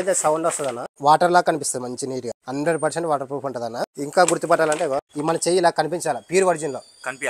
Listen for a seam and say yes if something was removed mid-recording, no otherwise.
yes